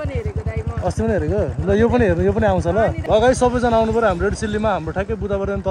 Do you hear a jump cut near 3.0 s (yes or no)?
yes